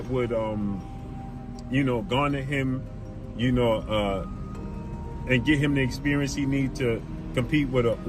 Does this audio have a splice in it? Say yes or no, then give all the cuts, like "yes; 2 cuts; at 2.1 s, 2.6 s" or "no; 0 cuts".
no; 0 cuts